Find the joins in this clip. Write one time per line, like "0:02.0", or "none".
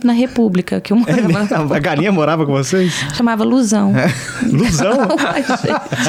none